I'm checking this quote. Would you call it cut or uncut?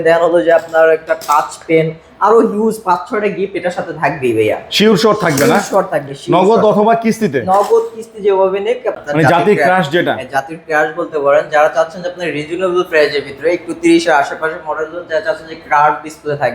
cut